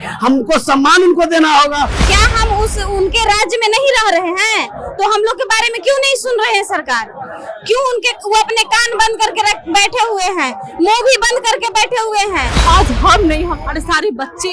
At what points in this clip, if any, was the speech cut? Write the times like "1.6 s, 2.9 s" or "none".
2.0 s, 12.5 s